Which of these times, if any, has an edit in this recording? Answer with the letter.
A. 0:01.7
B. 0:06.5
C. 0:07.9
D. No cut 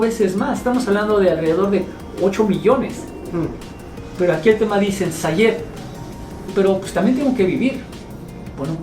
B